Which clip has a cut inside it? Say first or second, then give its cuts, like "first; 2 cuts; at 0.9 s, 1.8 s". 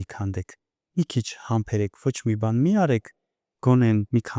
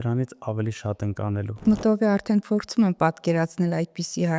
second; 1 cut; at 1.6 s